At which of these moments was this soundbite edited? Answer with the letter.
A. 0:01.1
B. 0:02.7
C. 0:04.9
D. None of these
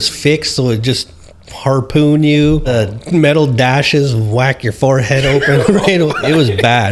B